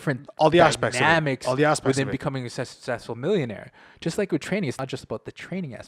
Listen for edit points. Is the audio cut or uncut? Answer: cut